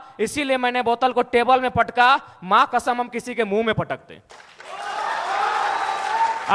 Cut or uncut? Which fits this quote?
uncut